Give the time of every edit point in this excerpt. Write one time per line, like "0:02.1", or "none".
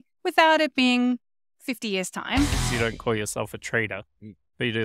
0:02.5